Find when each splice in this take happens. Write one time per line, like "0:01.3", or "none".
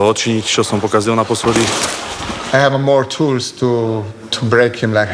0:01.9